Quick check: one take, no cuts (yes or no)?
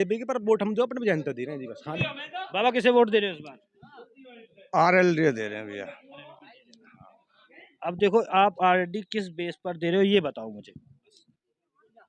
yes